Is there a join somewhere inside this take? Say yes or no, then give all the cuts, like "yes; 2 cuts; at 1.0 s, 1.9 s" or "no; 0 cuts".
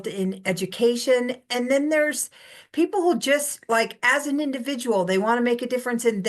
no; 0 cuts